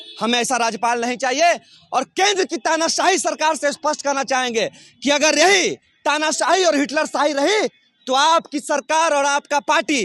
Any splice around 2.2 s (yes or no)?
no